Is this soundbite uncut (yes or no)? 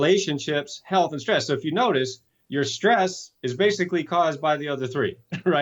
yes